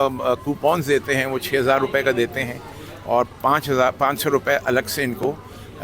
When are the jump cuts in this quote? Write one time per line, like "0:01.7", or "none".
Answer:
none